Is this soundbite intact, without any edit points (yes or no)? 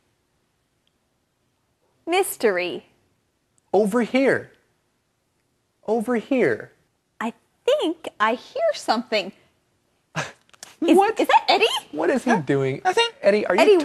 yes